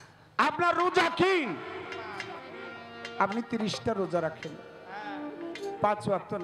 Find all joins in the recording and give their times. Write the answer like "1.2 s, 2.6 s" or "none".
none